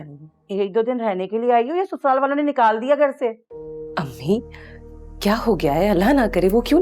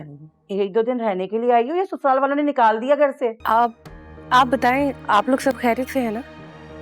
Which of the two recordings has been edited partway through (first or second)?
second